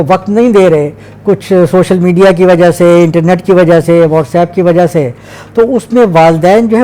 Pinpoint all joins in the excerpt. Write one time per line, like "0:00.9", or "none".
none